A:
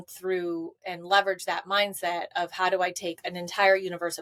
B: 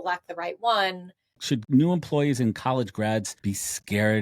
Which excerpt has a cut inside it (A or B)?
B